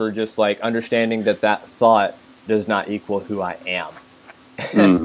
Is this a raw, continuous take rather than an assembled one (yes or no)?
yes